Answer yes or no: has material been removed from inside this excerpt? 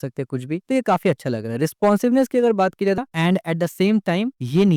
yes